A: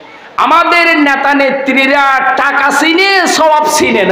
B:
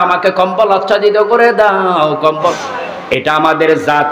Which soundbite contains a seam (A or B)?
B